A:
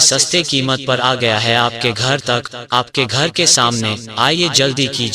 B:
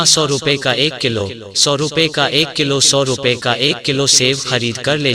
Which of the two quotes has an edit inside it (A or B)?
A